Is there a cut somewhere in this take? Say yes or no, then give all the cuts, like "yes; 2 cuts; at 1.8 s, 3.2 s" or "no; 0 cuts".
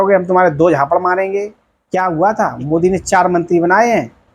yes; 1 cut; at 1.7 s